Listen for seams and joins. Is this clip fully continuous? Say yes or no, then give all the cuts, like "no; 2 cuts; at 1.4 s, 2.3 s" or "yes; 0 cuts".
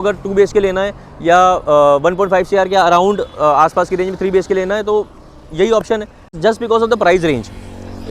no; 1 cut; at 6.4 s